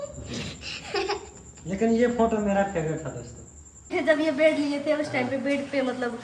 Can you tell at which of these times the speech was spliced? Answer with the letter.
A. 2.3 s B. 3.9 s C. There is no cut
B